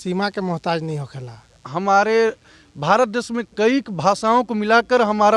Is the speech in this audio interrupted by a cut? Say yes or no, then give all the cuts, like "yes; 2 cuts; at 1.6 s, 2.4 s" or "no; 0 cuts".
yes; 1 cut; at 1.7 s